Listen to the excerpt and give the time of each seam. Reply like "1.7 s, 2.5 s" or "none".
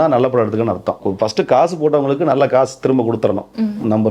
1.0 s